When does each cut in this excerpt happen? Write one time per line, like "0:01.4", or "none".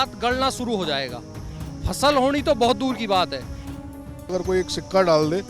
0:03.9